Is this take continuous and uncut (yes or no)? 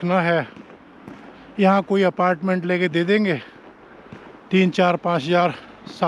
yes